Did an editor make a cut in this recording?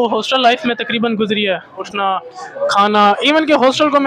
yes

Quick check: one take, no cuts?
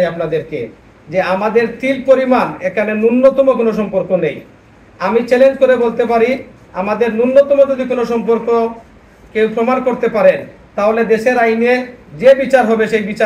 yes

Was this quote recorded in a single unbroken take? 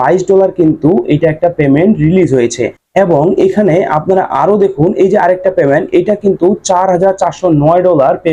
yes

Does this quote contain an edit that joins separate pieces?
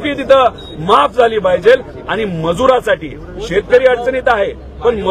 no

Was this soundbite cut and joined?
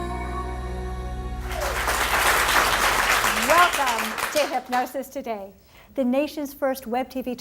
yes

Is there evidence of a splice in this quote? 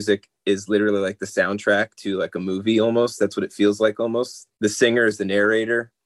yes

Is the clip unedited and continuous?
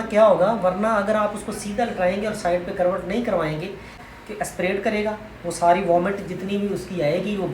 no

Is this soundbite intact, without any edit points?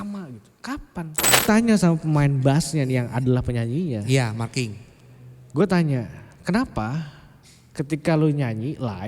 no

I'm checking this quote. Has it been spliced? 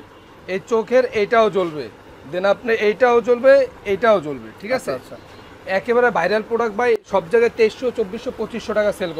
no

